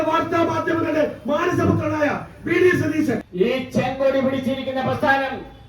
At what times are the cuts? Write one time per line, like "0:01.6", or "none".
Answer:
0:03.3